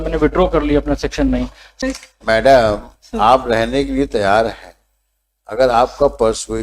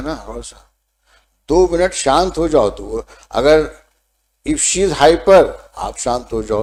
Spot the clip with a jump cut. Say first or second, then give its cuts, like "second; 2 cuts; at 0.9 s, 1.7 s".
first; 1 cut; at 1.7 s